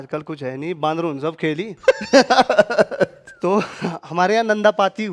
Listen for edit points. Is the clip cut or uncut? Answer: uncut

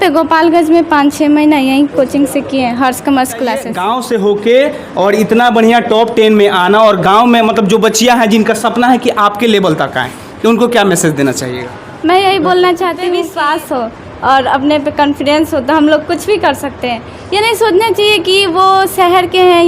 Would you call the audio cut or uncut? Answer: cut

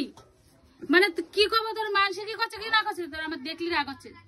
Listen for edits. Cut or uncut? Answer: uncut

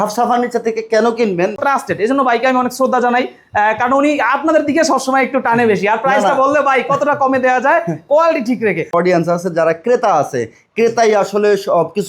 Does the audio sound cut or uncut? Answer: cut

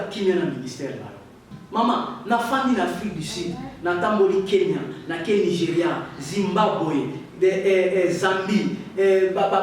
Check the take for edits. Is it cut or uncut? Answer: cut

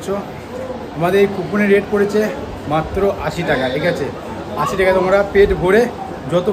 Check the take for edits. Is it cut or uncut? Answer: uncut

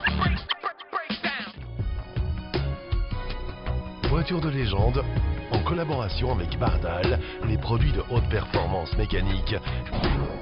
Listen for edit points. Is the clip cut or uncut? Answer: cut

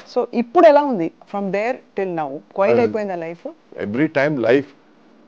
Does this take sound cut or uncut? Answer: cut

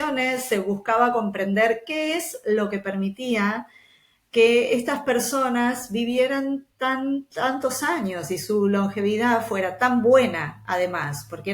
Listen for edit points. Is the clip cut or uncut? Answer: uncut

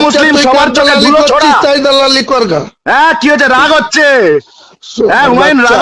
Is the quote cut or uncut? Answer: uncut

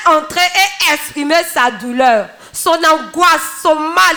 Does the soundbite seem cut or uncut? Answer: uncut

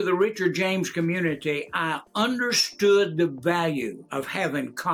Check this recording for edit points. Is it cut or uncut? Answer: cut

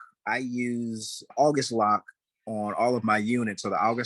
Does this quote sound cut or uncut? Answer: cut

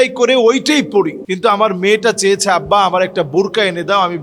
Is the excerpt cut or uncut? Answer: cut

